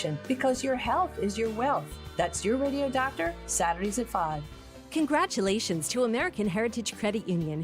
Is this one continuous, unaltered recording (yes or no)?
no